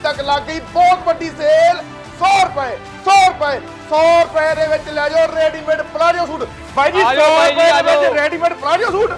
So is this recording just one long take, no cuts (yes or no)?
yes